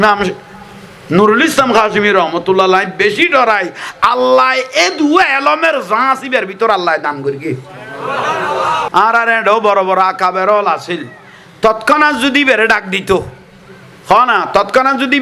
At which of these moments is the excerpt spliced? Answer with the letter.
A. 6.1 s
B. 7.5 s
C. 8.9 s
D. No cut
C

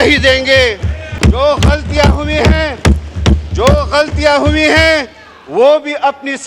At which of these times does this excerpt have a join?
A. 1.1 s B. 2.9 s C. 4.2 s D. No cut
A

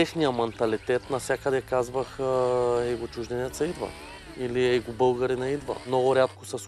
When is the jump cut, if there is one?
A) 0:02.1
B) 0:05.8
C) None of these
B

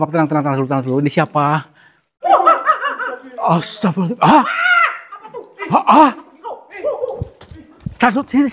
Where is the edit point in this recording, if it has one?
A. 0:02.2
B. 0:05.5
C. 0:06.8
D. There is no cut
A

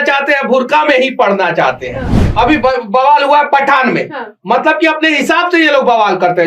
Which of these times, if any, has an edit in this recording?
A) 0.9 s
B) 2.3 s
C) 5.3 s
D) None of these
B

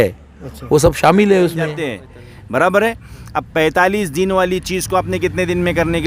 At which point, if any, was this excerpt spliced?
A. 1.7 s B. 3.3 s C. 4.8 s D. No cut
A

